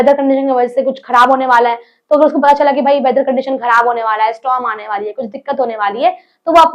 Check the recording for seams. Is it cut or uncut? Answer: uncut